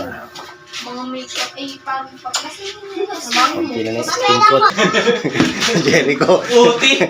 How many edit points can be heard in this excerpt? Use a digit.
1